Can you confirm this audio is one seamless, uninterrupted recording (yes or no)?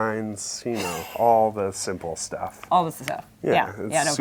yes